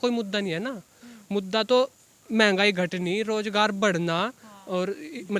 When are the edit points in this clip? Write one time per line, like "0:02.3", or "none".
none